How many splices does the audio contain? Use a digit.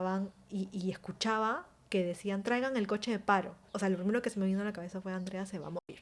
1